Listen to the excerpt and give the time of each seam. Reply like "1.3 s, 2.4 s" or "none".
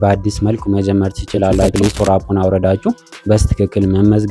1.7 s

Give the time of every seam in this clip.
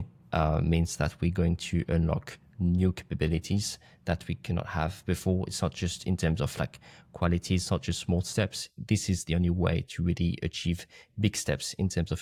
none

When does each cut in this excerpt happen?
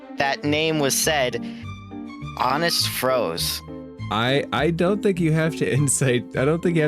none

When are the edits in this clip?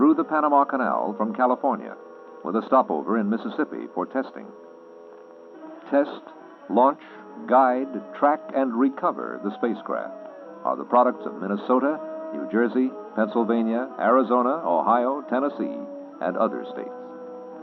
none

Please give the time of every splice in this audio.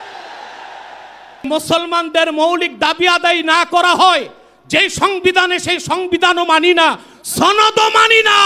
1.4 s

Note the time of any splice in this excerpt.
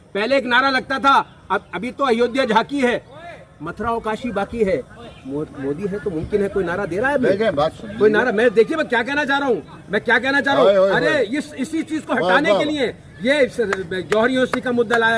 none

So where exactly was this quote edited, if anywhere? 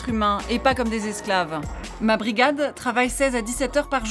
1.8 s

